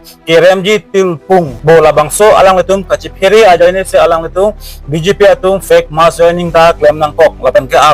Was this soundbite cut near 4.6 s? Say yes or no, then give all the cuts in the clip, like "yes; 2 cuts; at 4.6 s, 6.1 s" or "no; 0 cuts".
no; 1 cut; at 1.5 s